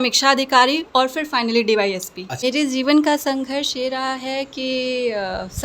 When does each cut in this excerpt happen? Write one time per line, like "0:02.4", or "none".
0:02.4